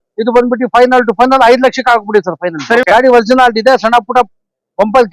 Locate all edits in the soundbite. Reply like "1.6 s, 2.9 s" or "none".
2.8 s